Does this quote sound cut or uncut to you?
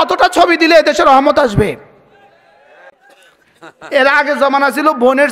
cut